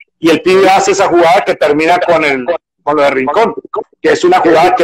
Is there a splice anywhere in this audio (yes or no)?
no